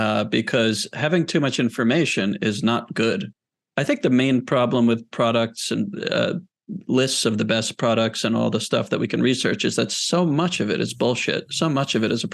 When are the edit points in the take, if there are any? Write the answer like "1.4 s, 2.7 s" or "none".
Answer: 3.3 s